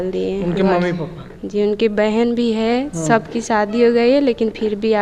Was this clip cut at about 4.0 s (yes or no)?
no